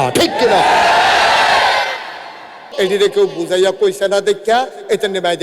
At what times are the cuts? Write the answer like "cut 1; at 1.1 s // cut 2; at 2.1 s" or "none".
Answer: cut 1; at 2.6 s